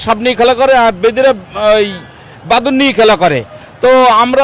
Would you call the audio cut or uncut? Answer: uncut